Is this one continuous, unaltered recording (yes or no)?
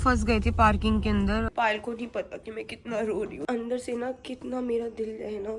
no